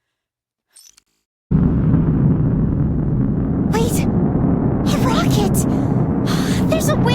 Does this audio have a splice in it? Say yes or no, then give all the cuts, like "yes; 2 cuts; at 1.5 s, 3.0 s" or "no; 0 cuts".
yes; 1 cut; at 1.5 s